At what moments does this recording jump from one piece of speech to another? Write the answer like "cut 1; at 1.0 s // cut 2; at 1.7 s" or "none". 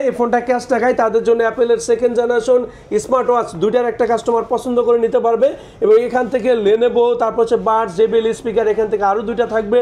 none